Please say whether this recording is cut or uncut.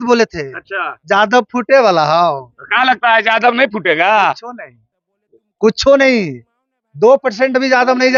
uncut